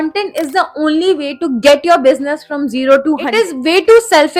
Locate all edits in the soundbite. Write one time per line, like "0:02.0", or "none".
0:03.3